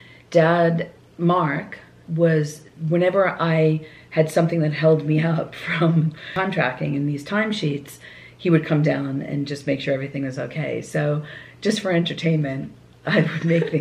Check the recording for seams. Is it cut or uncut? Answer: cut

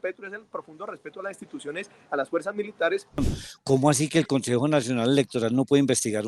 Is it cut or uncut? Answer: cut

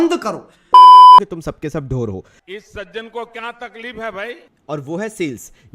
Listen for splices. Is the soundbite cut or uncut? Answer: cut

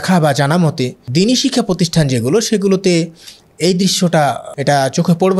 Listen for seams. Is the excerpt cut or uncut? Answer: cut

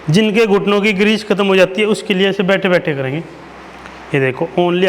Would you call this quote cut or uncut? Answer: uncut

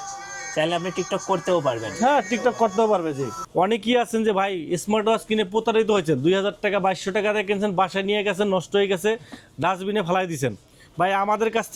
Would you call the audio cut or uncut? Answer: cut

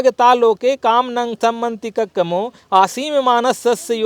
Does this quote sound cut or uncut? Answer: uncut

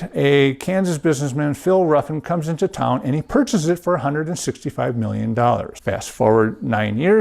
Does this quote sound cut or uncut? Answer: cut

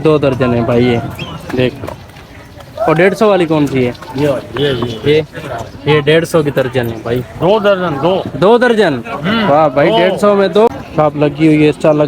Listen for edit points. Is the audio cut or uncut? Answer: cut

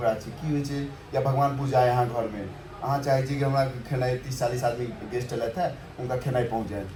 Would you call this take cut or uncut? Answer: uncut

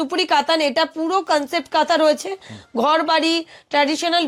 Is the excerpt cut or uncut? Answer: uncut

